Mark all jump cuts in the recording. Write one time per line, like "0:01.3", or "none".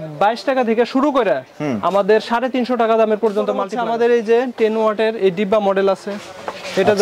0:03.4